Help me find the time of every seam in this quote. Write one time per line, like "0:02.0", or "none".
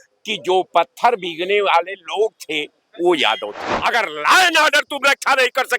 0:03.7